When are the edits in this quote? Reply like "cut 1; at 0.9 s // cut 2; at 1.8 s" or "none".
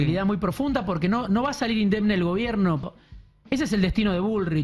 cut 1; at 2.8 s